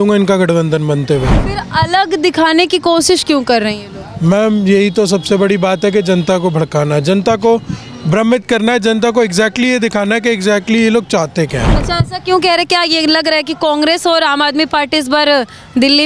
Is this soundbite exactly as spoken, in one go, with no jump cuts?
no; 2 cuts; at 1.4 s, 11.7 s

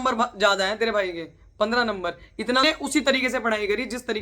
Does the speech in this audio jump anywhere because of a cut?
yes; 1 cut; at 2.6 s

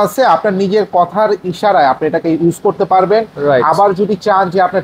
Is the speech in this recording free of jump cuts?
yes; 0 cuts

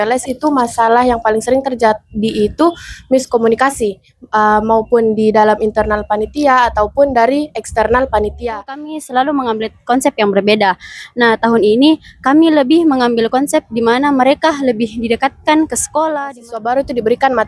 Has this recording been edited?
yes; 2 cuts; at 9.0 s, 16.4 s

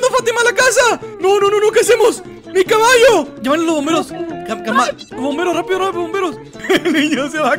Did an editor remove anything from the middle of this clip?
no; 0 cuts

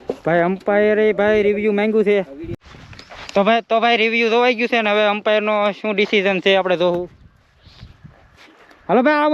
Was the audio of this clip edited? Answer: no; 0 cuts

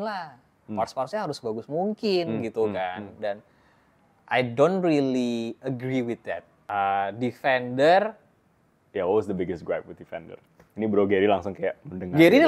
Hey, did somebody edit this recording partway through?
yes; 1 cut; at 6.5 s

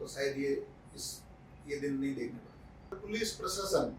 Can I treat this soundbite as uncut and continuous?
no; 1 cut; at 3.0 s

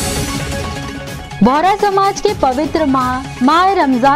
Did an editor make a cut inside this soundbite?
yes; 1 cut; at 1.3 s

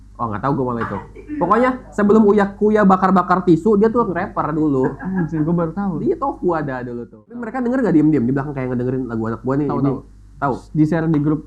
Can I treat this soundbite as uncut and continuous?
no; 1 cut; at 7.5 s

